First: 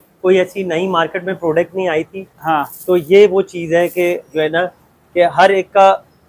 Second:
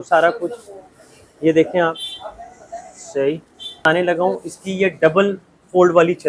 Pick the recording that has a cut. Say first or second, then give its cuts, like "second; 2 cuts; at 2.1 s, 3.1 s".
second; 1 cut; at 3.8 s